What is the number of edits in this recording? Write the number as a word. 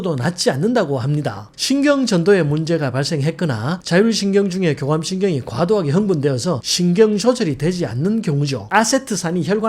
two